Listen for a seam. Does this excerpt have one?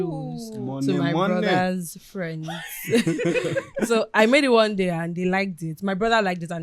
no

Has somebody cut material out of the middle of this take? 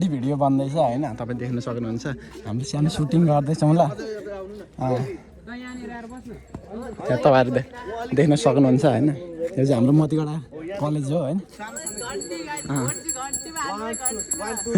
no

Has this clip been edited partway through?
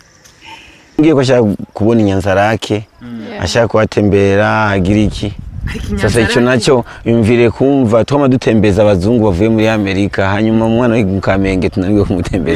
yes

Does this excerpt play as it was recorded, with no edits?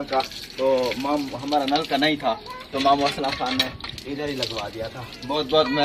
yes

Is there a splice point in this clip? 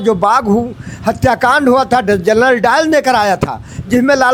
no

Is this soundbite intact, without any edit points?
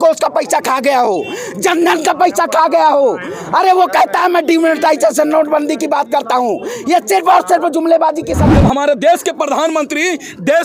no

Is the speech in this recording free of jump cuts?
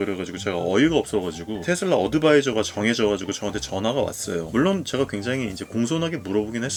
yes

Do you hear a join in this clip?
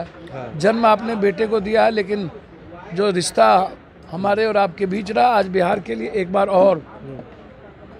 no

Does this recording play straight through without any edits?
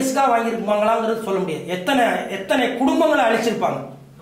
yes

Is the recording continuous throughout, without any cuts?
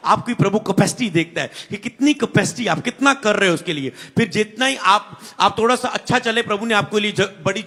yes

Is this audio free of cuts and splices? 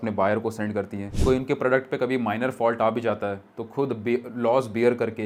yes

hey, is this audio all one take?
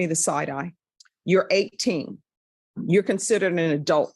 no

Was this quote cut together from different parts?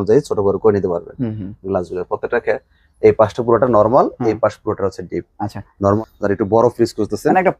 yes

